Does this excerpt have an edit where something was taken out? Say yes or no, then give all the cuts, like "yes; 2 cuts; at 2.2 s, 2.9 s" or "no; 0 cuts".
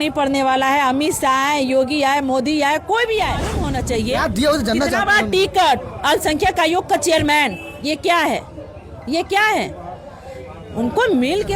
yes; 1 cut; at 3.9 s